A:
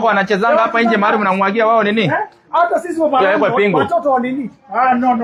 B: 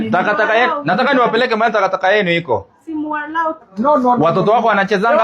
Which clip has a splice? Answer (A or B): B